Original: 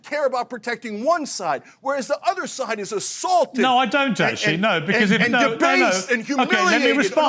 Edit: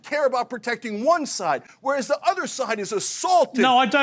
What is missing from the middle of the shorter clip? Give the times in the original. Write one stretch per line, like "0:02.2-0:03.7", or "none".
none